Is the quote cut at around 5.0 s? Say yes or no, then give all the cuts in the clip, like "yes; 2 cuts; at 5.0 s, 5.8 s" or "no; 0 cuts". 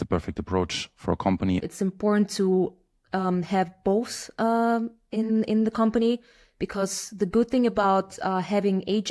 no; 1 cut; at 1.6 s